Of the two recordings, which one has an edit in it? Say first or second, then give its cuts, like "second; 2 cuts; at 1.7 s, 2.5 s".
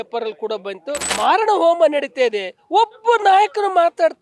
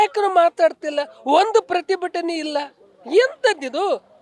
first; 1 cut; at 1.1 s